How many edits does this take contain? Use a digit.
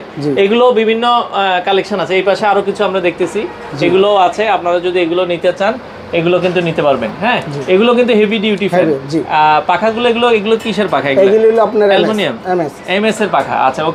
0